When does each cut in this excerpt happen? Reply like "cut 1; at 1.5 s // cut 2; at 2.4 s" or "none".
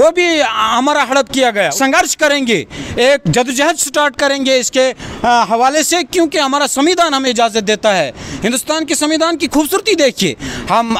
cut 1; at 1.7 s